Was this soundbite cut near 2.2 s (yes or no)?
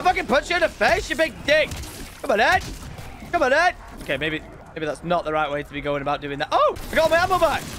no